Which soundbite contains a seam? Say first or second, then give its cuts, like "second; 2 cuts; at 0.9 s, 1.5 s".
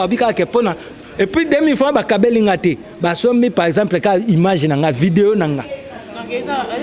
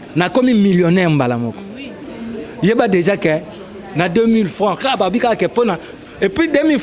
second; 1 cut; at 2.0 s